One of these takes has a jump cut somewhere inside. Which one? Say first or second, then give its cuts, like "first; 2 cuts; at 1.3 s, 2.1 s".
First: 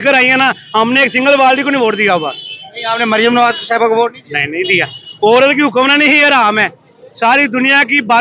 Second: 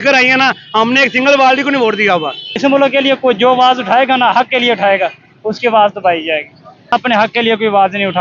second; 2 cuts; at 2.6 s, 6.9 s